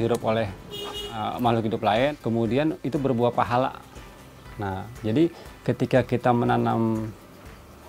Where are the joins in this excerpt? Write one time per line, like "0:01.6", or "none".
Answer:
0:02.1